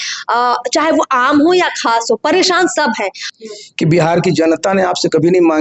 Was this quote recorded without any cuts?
no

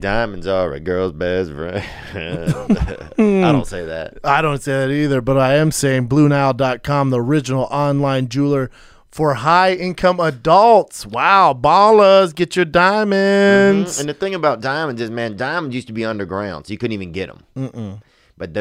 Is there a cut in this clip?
no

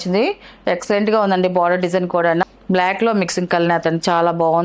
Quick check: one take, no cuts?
no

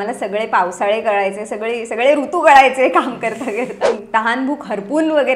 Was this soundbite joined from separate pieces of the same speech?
yes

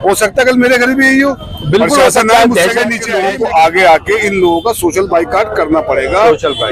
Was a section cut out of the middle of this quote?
yes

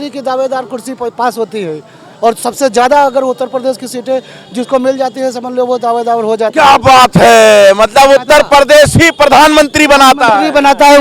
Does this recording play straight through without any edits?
yes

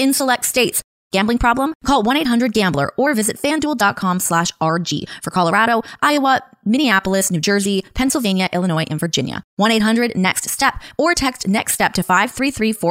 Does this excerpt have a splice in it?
yes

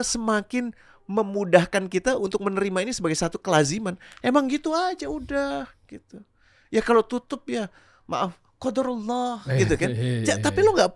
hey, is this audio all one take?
yes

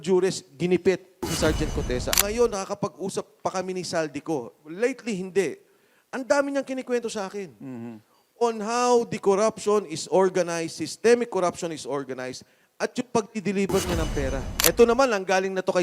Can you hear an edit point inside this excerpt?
yes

